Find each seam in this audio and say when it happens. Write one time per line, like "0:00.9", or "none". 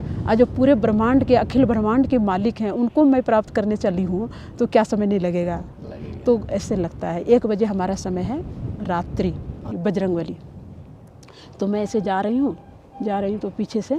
0:09.7

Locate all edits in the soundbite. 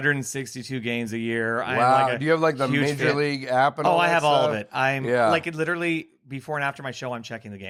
none

